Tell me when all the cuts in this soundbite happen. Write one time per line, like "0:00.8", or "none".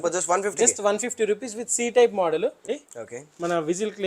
0:02.6